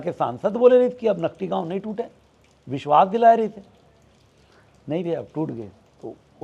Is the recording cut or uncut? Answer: uncut